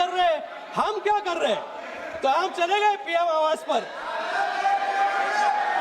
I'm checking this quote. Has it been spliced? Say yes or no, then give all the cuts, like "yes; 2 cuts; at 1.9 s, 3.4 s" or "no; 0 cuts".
no; 0 cuts